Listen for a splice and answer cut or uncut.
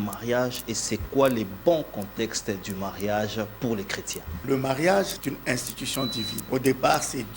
cut